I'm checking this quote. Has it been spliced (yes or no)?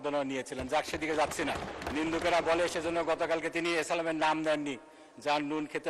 yes